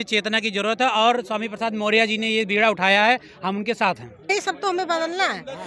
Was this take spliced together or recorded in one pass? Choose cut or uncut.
cut